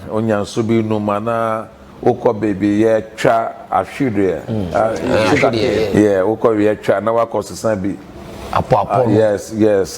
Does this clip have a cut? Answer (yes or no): yes